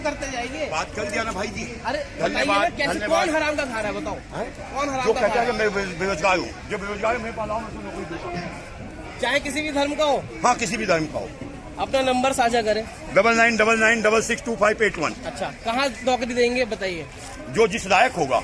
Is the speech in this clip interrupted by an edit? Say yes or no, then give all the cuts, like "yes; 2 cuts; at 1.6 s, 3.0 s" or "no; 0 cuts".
no; 0 cuts